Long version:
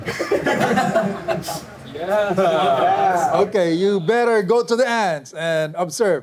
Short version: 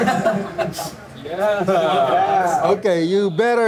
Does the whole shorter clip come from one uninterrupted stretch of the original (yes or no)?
yes